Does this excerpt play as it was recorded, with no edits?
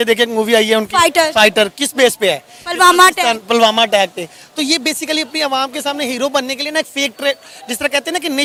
yes; 0 cuts

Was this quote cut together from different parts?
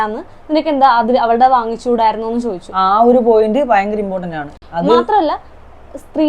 no; 0 cuts

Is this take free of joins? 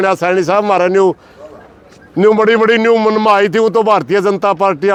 yes; 0 cuts

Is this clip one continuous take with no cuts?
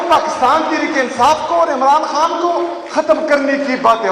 yes; 0 cuts

